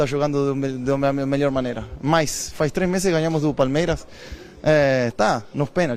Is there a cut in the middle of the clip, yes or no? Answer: no